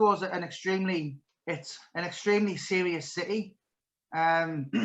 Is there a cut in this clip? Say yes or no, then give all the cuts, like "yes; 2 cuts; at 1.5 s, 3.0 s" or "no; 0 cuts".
yes; 1 cut; at 1.3 s